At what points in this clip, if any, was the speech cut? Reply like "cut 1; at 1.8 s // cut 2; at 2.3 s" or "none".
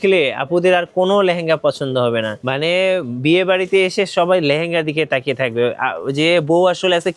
cut 1; at 2.4 s